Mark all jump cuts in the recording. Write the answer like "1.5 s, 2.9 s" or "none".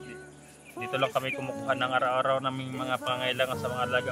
0.9 s